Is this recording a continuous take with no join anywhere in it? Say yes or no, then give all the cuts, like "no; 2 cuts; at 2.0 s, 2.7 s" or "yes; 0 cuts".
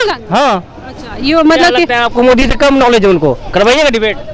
yes; 0 cuts